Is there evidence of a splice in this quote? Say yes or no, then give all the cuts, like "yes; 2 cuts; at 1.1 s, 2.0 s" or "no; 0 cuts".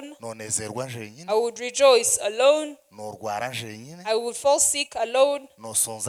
no; 0 cuts